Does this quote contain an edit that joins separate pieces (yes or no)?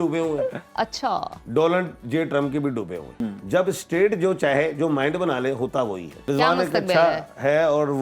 yes